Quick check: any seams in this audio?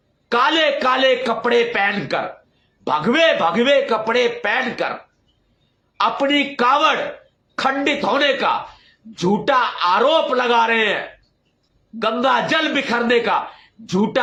no; 0 cuts

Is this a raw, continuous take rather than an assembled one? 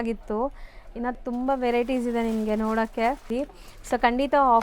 no; 1 cut; at 3.3 s

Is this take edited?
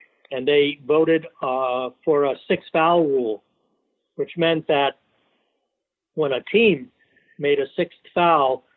no; 0 cuts

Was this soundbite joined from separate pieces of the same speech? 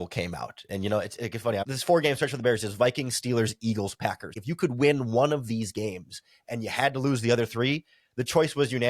yes; 2 cuts; at 1.7 s, 4.4 s

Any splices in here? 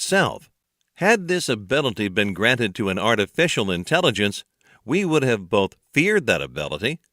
yes; 1 cut; at 2.7 s

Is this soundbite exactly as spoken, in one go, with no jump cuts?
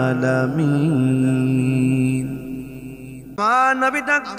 no; 1 cut; at 3.4 s

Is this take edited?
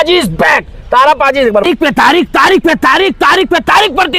yes; 1 cut; at 1.6 s

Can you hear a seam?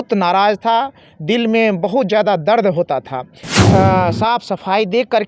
yes; 1 cut; at 3.5 s

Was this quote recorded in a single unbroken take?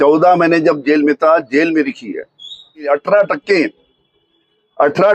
no; 1 cut; at 2.9 s

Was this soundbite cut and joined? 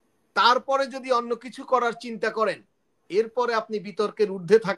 no; 0 cuts

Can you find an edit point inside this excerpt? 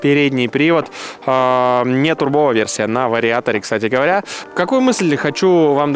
no; 0 cuts

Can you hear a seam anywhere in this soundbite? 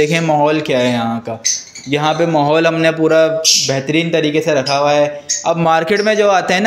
no; 0 cuts

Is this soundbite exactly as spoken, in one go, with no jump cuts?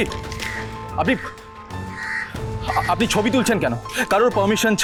yes; 0 cuts

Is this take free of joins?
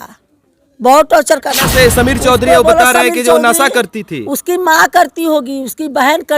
no; 1 cut; at 1.6 s

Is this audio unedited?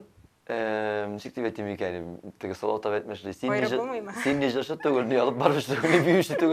yes; 0 cuts

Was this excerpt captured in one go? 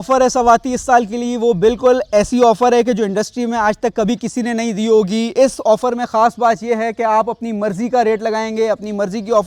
yes; 0 cuts

